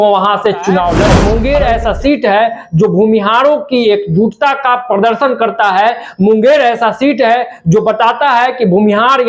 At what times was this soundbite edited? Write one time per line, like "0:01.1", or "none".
0:01.2